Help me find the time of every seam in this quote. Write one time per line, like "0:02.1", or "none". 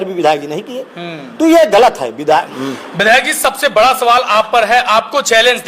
0:02.5